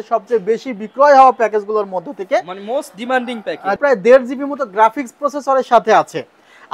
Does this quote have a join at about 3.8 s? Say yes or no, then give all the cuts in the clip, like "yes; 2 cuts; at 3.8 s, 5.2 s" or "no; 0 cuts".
yes; 1 cut; at 3.8 s